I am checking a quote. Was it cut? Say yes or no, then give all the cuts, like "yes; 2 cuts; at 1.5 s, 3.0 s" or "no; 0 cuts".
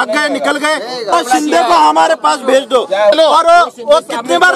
yes; 1 cut; at 3.1 s